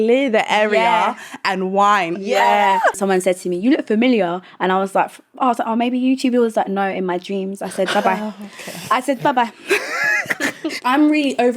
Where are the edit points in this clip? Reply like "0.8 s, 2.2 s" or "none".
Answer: 3.0 s, 10.8 s